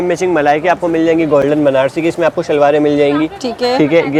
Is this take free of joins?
yes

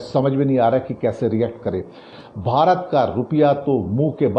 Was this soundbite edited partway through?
yes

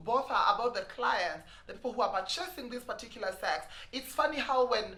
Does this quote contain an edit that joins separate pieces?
no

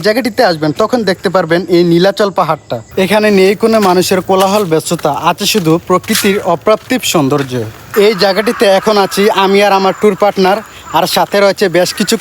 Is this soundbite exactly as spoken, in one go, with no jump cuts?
no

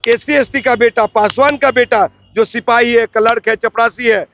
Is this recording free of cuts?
yes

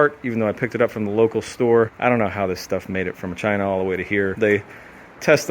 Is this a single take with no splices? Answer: no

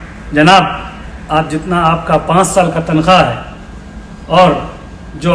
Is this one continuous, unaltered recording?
yes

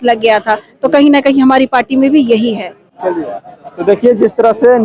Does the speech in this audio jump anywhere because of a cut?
no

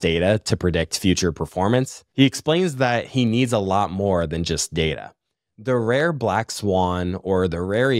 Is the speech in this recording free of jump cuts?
no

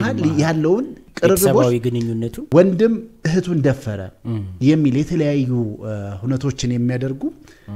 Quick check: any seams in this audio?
yes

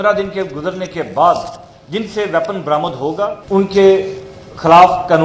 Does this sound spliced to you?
yes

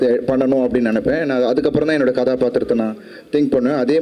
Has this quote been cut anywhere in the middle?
no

